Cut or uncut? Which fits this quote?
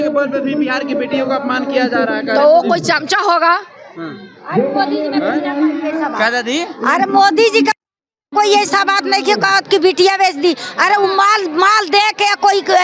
uncut